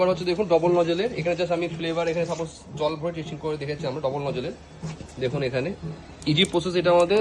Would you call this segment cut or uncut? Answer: uncut